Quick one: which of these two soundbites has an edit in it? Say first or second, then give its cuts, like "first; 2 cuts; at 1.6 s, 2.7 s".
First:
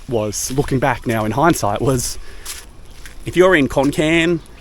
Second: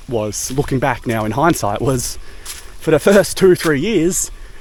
first; 1 cut; at 2.7 s